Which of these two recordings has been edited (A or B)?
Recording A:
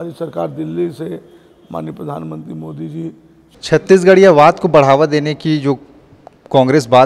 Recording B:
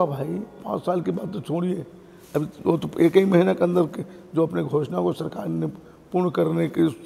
A